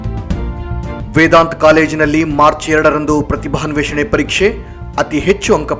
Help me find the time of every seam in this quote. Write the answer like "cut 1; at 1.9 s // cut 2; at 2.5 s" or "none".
cut 1; at 1.0 s